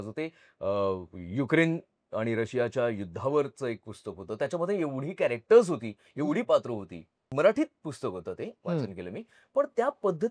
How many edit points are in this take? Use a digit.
1